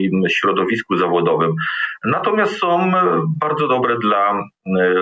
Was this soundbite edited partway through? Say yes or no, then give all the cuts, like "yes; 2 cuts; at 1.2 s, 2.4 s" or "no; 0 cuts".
no; 0 cuts